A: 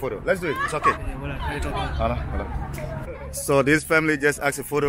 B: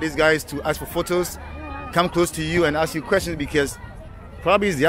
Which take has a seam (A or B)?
A